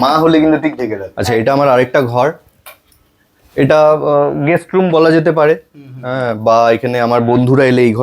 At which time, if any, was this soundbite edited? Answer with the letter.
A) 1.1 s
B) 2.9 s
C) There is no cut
A